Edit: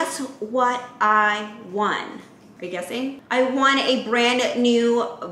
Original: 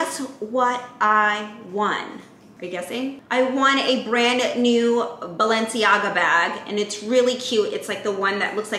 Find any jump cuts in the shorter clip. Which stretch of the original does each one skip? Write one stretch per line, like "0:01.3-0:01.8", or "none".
none